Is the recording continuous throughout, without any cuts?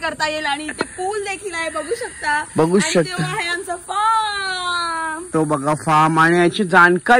yes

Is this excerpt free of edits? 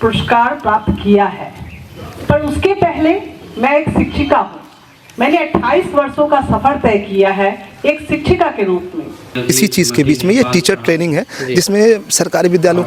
no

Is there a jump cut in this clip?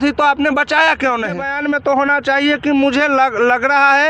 yes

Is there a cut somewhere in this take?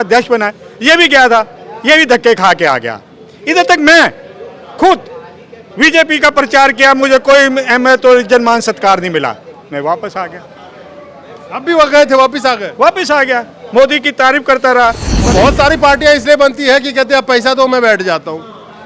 yes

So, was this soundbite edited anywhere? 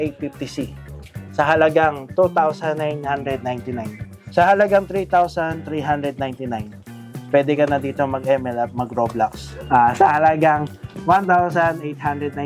yes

